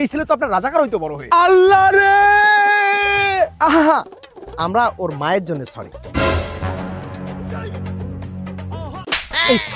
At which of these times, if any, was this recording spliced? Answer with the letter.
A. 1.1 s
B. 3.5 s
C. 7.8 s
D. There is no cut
A